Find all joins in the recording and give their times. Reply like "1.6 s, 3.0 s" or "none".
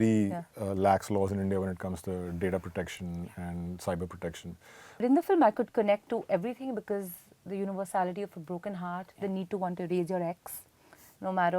4.9 s